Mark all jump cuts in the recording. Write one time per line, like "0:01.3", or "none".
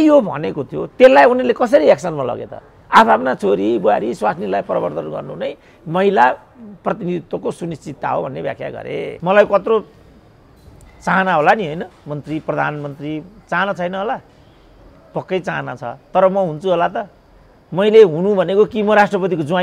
0:09.1